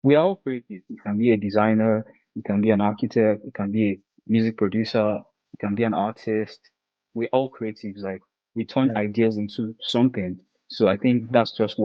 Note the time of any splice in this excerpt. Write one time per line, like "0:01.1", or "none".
0:00.9